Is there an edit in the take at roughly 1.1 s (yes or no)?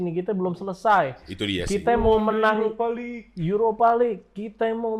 no